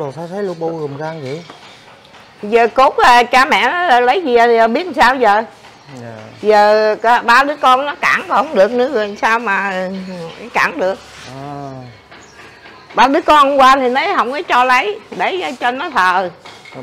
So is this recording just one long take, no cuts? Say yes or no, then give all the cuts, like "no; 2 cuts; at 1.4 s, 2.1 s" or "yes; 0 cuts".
yes; 0 cuts